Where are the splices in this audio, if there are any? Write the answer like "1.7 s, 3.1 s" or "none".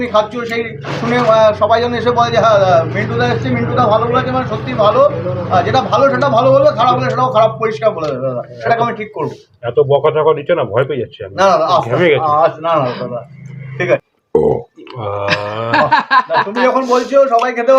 14.1 s